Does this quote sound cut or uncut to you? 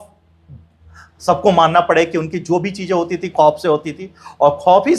uncut